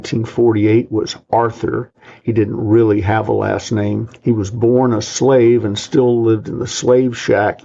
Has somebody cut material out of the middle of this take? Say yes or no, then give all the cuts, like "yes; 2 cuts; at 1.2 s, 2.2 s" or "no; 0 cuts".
no; 0 cuts